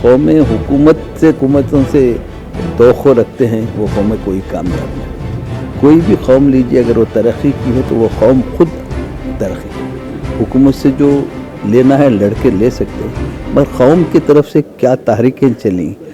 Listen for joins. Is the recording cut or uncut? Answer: cut